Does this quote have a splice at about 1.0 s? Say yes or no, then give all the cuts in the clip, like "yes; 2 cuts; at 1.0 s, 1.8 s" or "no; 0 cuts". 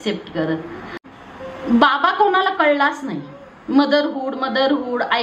yes; 1 cut; at 1.0 s